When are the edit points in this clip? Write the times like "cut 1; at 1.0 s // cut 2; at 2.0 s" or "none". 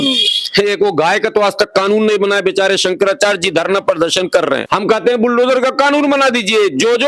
none